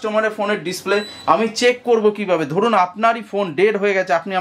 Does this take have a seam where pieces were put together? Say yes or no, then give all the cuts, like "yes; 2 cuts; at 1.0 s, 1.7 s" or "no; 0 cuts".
no; 0 cuts